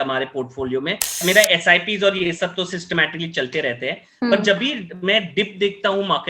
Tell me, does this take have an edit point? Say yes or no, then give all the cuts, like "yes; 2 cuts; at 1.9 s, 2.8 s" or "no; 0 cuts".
yes; 1 cut; at 1.2 s